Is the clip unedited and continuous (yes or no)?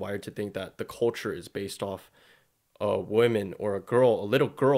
yes